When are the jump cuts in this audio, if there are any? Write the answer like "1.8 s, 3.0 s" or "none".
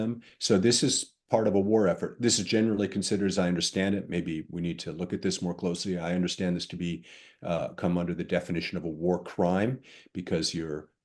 none